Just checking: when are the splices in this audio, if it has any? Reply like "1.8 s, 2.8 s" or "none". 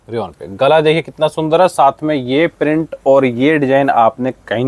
none